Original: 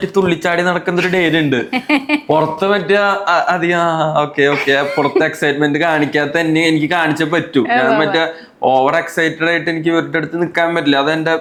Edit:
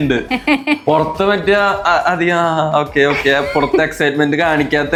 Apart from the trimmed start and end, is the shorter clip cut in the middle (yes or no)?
no